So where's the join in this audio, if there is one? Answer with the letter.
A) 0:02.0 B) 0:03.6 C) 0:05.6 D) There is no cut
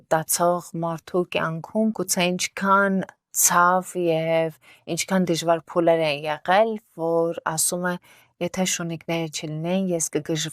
A